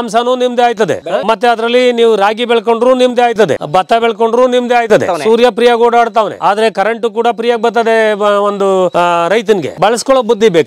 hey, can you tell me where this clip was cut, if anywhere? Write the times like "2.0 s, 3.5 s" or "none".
1.1 s, 5.1 s, 9.8 s